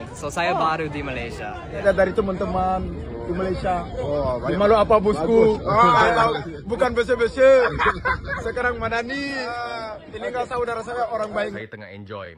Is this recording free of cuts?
no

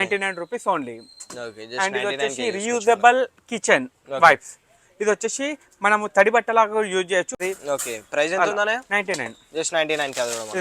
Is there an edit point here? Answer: yes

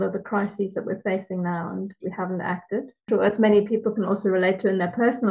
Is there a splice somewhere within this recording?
yes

